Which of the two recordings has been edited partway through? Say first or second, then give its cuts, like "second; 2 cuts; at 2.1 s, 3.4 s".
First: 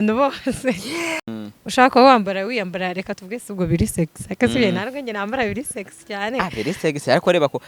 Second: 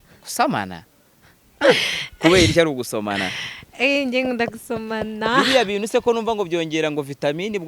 first; 1 cut; at 1.2 s